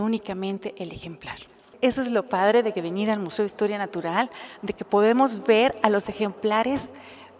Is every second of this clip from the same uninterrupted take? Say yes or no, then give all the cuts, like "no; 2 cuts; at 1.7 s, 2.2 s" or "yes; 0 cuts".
no; 1 cut; at 1.7 s